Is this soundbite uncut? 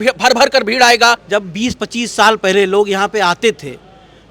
no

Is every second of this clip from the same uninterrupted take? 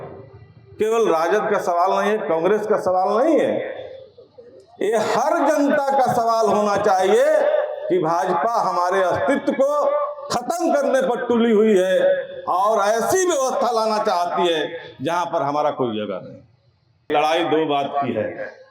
no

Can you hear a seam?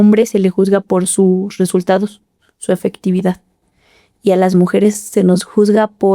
no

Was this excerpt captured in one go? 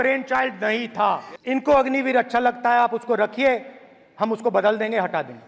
no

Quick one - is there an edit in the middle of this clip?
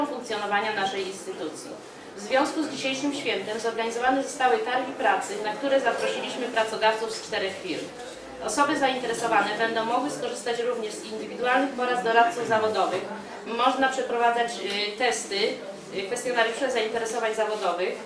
no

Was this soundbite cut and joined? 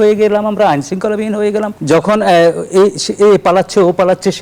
yes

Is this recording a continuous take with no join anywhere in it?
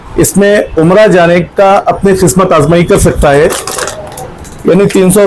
yes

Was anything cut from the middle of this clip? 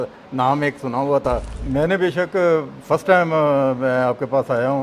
yes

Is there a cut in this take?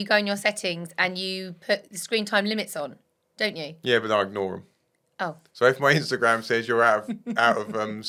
no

